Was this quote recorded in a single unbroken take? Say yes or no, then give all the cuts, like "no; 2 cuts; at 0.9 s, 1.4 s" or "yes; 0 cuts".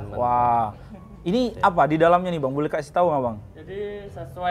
yes; 0 cuts